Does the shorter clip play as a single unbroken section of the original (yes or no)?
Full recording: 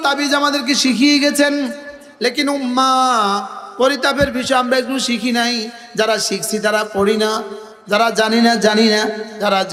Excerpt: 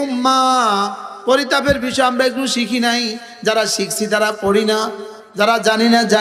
yes